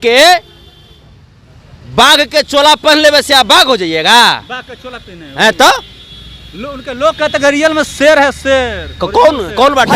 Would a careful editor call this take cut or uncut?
uncut